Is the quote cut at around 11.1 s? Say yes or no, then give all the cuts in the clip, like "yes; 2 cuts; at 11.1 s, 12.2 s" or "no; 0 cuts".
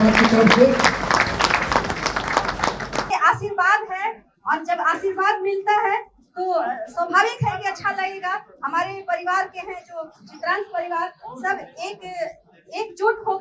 no; 1 cut; at 3.1 s